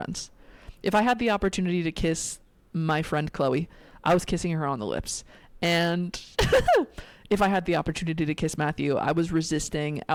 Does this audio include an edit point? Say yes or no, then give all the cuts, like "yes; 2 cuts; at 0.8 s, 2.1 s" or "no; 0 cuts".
no; 0 cuts